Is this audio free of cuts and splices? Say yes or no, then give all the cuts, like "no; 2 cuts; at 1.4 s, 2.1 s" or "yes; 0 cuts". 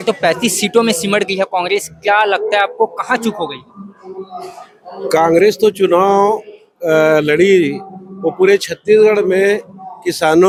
yes; 0 cuts